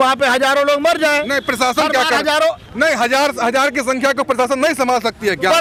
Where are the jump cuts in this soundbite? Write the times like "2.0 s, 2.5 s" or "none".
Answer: none